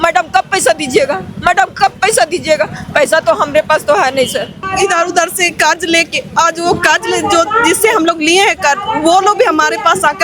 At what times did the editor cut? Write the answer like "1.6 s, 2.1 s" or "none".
4.7 s